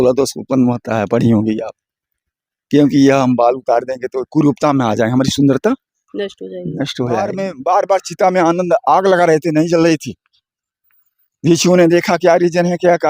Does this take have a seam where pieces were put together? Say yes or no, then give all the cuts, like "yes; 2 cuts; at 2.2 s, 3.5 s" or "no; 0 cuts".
yes; 1 cut; at 7.5 s